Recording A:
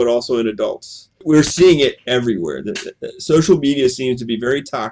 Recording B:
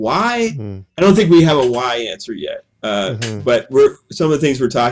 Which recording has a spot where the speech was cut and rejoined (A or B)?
A